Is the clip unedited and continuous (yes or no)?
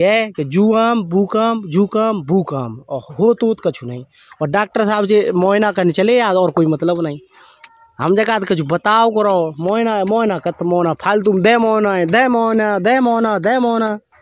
yes